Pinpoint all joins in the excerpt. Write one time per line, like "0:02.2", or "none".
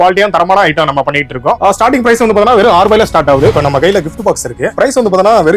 0:01.6
0:03.5
0:04.7